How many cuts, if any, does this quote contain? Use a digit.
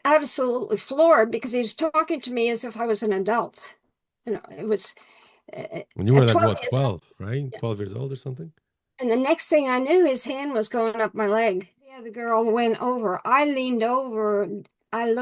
1